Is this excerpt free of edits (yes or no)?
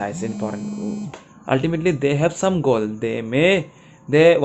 no